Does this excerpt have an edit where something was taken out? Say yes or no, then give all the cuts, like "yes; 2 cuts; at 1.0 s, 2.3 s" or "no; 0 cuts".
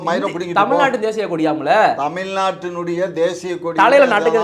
no; 0 cuts